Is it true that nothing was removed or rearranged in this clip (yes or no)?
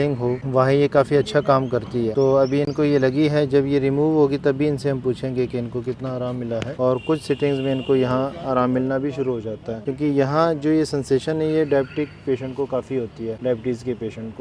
yes